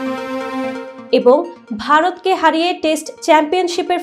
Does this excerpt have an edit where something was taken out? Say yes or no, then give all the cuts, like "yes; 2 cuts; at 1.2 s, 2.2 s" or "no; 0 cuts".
yes; 1 cut; at 0.9 s